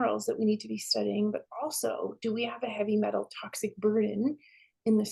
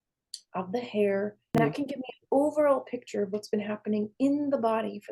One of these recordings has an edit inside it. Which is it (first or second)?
second